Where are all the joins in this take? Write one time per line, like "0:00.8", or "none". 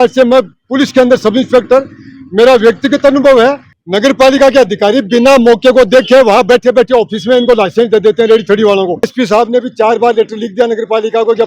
0:03.7
0:09.1

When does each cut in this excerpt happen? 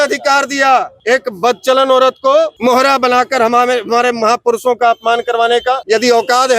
0:00.9
0:02.5
0:05.8

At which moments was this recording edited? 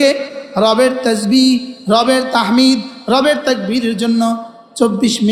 none

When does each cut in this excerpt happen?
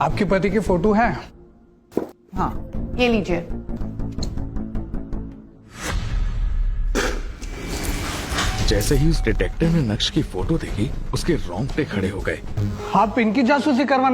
0:02.7
0:03.8
0:12.6

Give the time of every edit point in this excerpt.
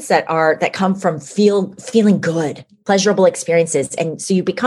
0:02.7

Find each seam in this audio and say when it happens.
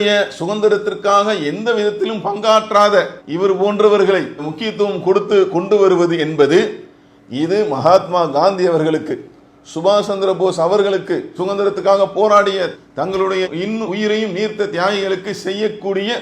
none

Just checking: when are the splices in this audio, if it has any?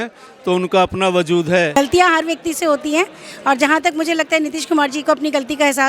0:01.7

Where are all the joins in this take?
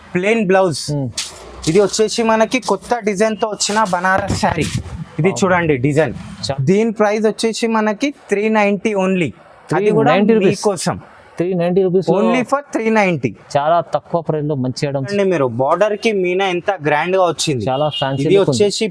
0:06.5
0:15.1

